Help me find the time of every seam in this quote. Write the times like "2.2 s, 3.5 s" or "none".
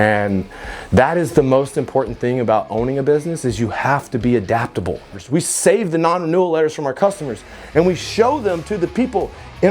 5.2 s